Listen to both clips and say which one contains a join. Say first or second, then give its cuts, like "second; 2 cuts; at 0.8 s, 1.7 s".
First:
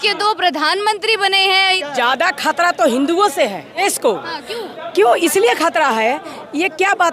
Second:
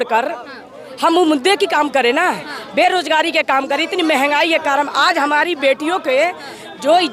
first; 2 cuts; at 1.8 s, 3.8 s